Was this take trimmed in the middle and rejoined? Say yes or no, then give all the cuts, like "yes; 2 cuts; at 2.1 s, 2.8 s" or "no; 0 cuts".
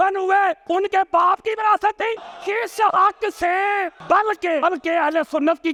no; 0 cuts